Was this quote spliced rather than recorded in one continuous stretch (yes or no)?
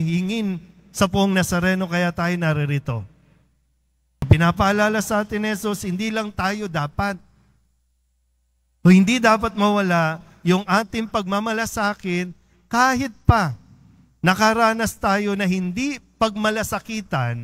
yes